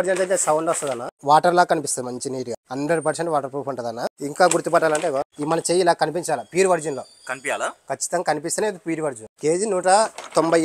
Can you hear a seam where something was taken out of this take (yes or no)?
yes